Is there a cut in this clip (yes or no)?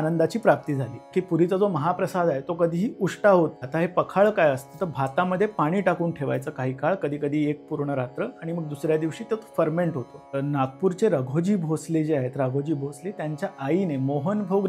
yes